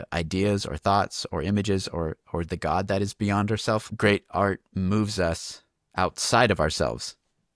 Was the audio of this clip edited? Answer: no; 0 cuts

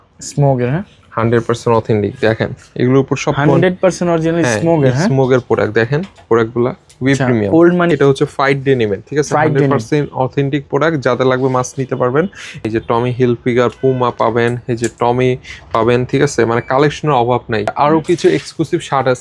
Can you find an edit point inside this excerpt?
yes; 3 cuts; at 7.9 s, 12.6 s, 17.7 s

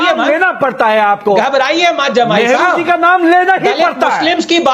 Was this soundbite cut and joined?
no; 0 cuts

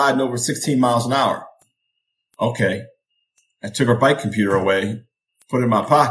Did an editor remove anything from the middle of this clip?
no; 0 cuts

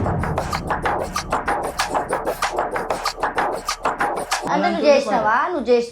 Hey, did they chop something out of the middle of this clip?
yes; 1 cut; at 4.4 s

